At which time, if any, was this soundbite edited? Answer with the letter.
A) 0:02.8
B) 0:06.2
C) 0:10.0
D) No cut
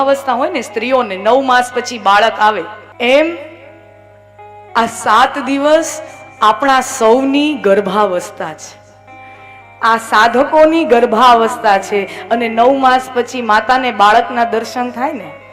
A